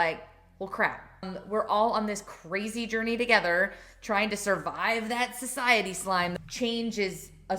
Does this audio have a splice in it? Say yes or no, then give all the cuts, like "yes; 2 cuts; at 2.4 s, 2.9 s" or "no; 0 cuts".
yes; 2 cuts; at 1.3 s, 6.3 s